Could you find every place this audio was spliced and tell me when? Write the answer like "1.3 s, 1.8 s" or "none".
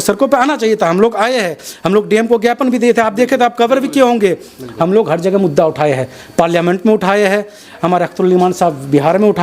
none

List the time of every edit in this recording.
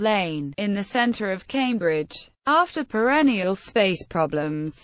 1.6 s

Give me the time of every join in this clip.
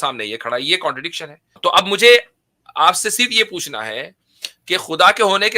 1.5 s

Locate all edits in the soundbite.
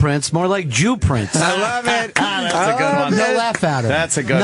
2.3 s

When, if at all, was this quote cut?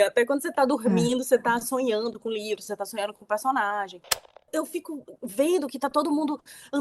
4.5 s

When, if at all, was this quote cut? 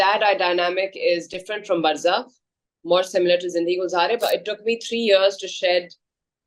4.2 s

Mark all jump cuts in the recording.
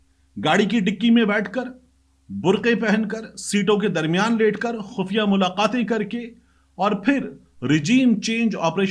none

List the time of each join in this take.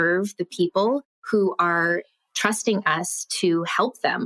1.1 s

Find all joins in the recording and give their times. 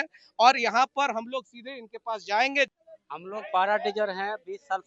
2.7 s

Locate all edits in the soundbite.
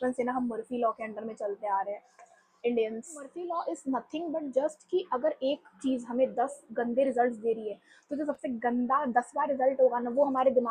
3.3 s

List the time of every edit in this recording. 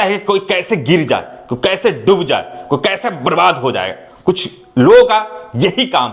none

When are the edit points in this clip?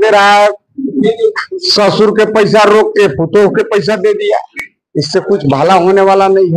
none

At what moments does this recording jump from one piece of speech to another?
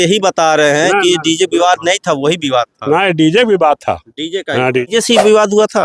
4.9 s

